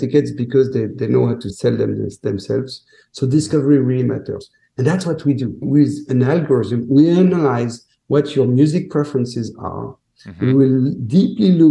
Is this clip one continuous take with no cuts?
no; 2 cuts; at 1.5 s, 5.7 s

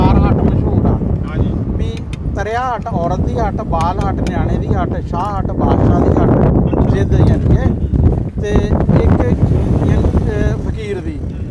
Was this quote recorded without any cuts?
yes; 0 cuts

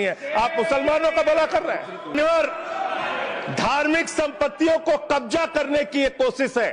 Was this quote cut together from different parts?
yes; 1 cut; at 2.1 s

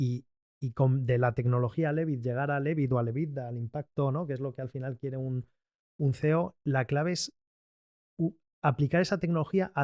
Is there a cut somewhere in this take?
no; 0 cuts

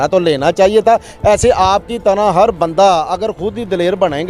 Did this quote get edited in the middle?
no; 0 cuts

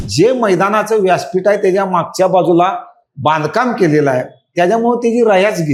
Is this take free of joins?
yes; 0 cuts

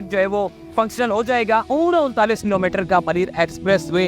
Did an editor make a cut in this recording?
yes; 1 cut; at 1.7 s

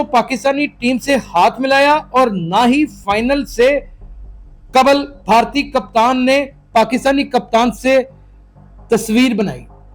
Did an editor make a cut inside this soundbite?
no; 0 cuts

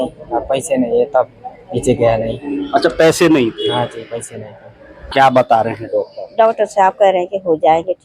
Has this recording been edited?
yes; 1 cut; at 5.0 s

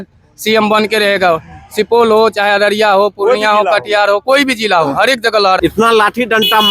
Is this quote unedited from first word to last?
no; 1 cut; at 5.6 s

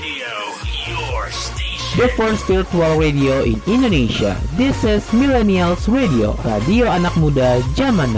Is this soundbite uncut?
yes; 0 cuts

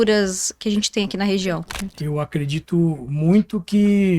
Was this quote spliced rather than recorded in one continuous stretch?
yes; 1 cut; at 1.7 s

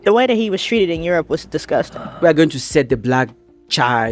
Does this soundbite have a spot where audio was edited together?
yes; 1 cut; at 2.0 s

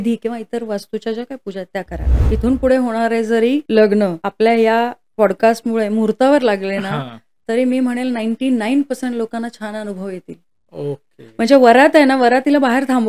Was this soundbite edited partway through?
yes; 3 cuts; at 2.1 s, 3.6 s, 4.2 s

